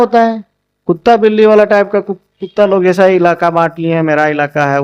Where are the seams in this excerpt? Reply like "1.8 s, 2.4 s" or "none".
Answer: none

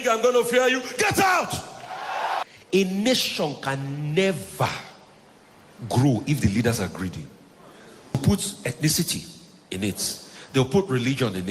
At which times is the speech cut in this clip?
2.4 s, 8.2 s

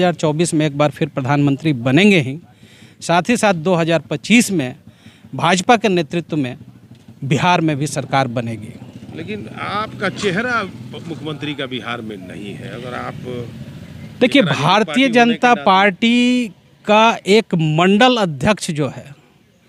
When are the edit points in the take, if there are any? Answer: none

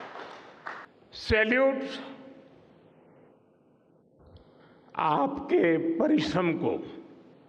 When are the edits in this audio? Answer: 1.0 s

